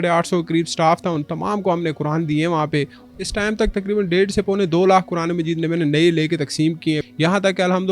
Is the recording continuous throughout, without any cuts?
no; 2 cuts; at 3.0 s, 7.1 s

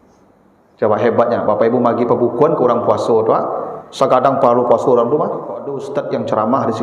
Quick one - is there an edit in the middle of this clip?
yes; 1 cut; at 5.8 s

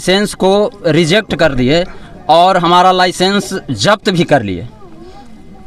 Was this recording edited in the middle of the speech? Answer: no; 0 cuts

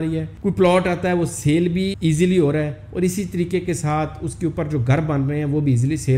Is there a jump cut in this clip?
yes; 1 cut; at 1.9 s

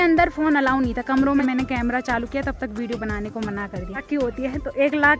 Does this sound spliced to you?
yes; 2 cuts; at 1.4 s, 4.0 s

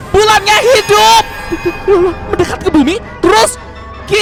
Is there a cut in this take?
no; 0 cuts

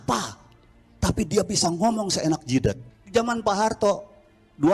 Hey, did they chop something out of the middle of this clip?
yes; 1 cut; at 2.9 s

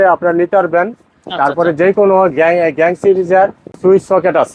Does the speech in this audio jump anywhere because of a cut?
yes; 1 cut; at 3.7 s

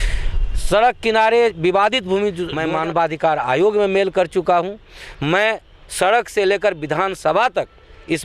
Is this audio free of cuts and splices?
no; 1 cut; at 2.5 s

